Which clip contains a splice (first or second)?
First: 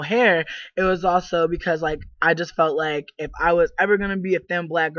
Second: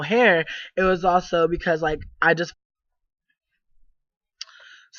first